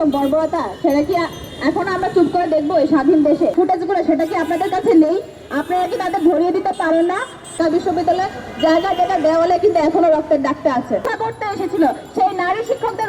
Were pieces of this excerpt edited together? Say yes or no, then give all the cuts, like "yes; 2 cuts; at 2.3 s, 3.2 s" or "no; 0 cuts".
yes; 3 cuts; at 3.5 s, 7.5 s, 11.1 s